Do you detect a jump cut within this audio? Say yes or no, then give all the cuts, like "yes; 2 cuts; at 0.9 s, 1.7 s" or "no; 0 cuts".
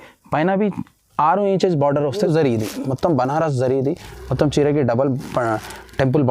yes; 1 cut; at 2.3 s